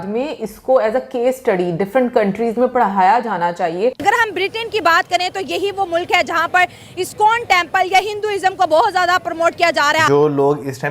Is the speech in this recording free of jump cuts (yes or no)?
no